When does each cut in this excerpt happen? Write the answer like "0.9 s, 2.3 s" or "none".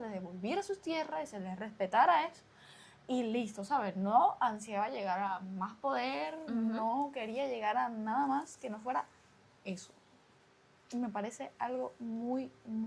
none